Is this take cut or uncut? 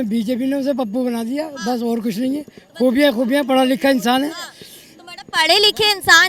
uncut